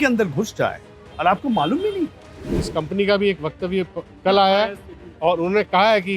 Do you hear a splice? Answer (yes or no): yes